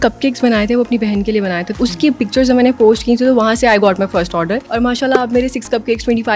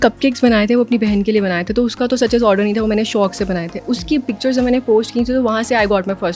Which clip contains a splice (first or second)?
first